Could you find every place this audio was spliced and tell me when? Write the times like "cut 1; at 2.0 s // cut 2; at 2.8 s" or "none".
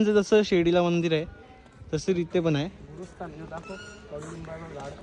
none